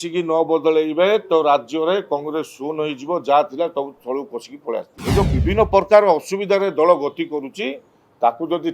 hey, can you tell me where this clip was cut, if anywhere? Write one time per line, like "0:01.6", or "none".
0:04.9